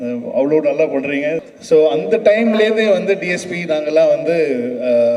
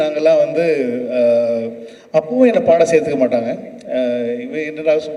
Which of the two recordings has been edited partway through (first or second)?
first